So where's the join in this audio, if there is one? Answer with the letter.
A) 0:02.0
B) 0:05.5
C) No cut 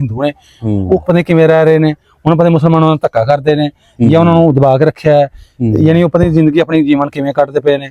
C